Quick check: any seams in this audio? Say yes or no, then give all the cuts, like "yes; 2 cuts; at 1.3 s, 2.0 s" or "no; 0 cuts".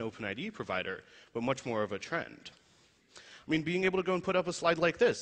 no; 0 cuts